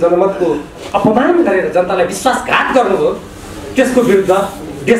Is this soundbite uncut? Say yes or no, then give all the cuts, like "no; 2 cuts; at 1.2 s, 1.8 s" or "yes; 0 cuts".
yes; 0 cuts